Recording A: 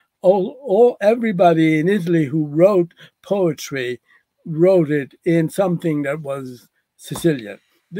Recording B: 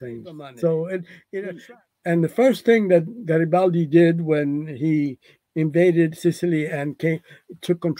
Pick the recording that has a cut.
B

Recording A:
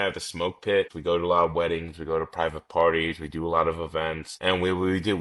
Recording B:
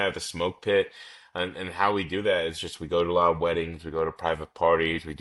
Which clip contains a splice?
A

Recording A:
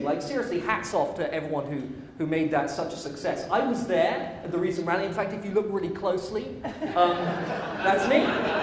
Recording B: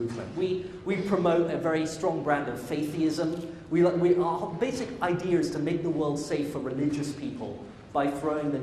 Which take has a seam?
B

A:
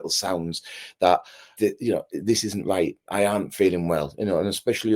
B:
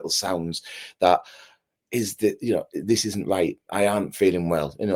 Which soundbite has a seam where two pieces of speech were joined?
A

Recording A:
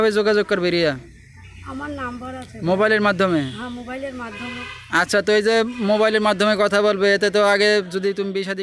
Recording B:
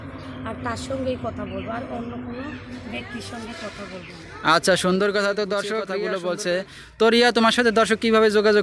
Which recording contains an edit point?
B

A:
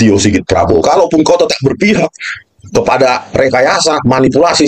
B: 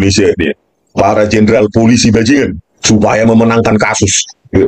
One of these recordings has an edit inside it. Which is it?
B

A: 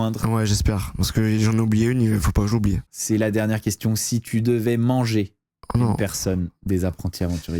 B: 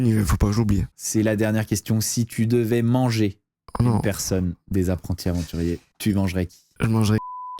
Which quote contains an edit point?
B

